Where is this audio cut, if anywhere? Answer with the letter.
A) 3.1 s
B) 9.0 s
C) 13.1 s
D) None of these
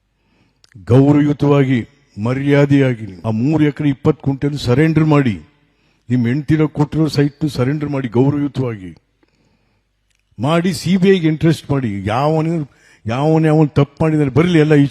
A